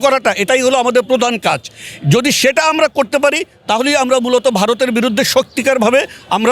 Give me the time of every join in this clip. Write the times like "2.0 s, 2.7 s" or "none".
none